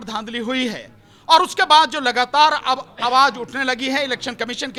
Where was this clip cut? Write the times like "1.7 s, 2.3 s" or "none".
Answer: none